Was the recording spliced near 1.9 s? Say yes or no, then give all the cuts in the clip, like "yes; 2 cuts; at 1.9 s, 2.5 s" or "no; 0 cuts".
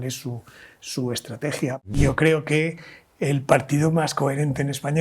yes; 1 cut; at 1.9 s